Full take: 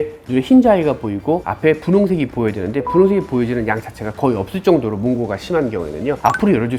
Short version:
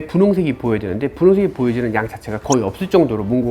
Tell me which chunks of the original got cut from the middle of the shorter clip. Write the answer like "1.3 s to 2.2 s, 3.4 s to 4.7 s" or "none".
none

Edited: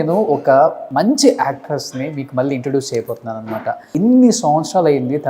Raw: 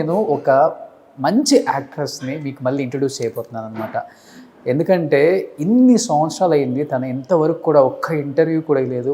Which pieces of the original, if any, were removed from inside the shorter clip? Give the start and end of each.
0.8 s to 1.1 s, 4.1 s to 5.5 s

